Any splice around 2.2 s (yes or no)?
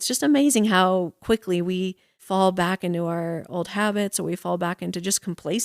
yes